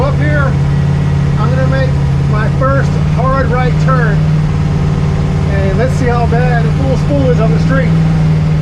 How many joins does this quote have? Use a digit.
0